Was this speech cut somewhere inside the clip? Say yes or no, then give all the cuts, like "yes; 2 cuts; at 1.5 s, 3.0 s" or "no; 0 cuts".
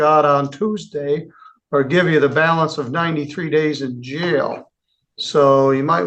no; 0 cuts